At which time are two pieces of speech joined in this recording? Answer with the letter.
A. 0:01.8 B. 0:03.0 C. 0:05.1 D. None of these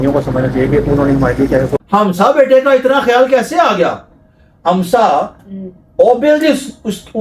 A